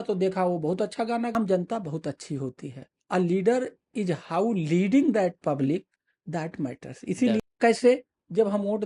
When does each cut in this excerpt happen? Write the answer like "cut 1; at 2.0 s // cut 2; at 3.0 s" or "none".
cut 1; at 1.3 s // cut 2; at 7.4 s

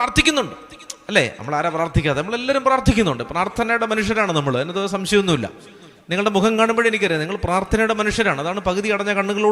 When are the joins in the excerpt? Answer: none

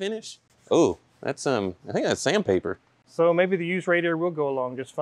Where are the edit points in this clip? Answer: none

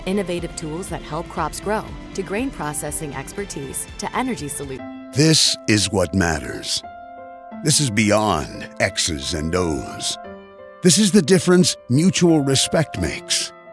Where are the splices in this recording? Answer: cut 1; at 4.8 s

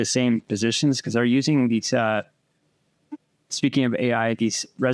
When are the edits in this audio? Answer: none

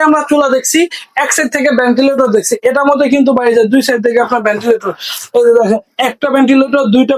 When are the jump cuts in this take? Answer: none

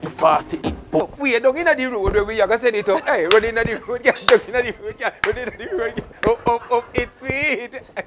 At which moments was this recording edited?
cut 1; at 1.1 s

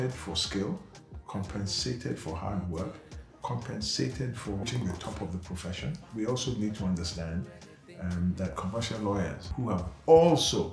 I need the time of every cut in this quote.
cut 1; at 4.6 s // cut 2; at 6.1 s // cut 3; at 9.4 s

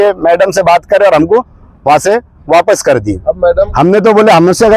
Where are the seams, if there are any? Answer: cut 1; at 3.7 s

